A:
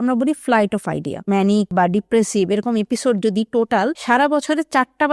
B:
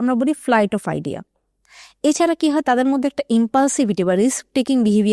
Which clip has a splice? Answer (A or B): A